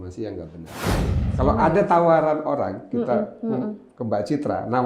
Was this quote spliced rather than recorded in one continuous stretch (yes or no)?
yes